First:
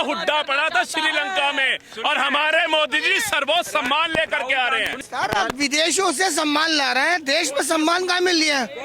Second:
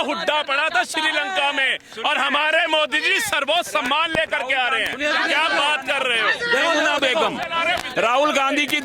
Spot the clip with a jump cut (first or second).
first